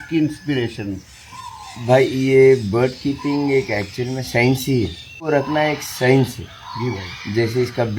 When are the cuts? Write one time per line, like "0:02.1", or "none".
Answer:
0:05.1

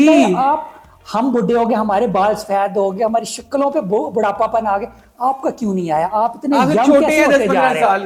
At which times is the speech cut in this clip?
none

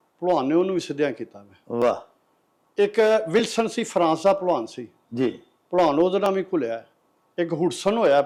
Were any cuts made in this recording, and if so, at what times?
none

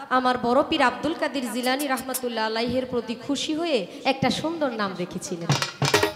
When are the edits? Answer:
none

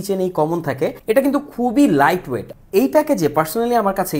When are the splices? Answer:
0:01.0
0:02.5

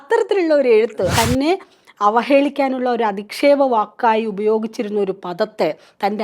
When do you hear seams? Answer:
0:01.0

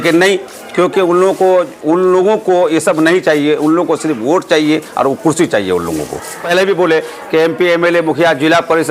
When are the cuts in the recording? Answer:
0:06.4

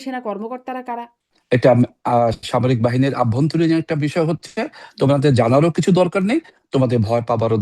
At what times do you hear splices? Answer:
0:01.3

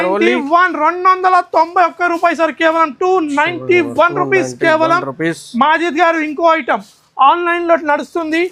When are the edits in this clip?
none

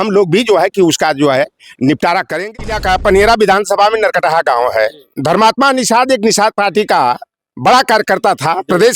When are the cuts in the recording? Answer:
0:02.5

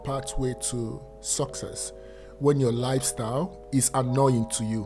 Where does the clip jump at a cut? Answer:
0:03.6

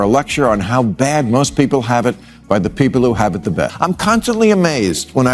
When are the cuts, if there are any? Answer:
none

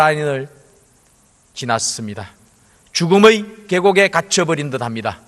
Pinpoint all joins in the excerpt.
none

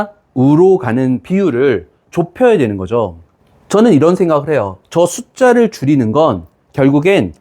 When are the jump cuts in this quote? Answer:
0:02.0

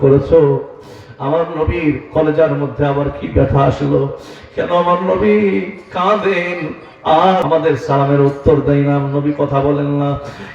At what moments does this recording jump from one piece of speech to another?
0:07.4

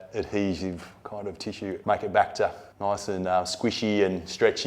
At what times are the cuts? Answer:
0:01.8
0:02.7

